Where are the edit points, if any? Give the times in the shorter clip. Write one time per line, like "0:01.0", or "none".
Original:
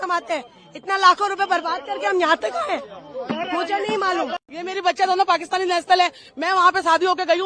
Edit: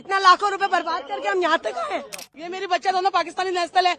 0:02.3